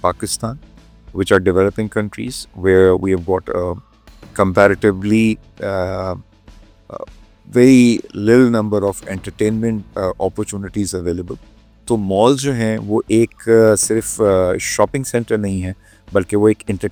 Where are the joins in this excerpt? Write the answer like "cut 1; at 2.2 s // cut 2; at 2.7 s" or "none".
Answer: none